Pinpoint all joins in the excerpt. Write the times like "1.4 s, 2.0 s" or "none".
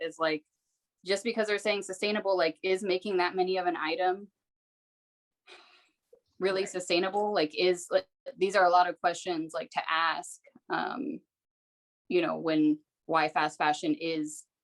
none